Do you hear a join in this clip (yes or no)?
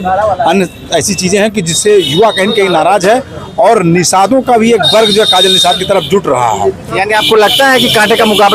no